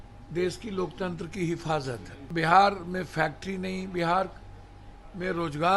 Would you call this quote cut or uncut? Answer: cut